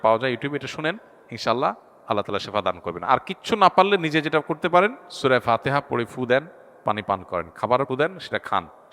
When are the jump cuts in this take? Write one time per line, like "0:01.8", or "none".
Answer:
0:05.1
0:07.9